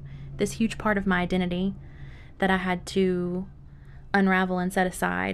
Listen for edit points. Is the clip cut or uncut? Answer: uncut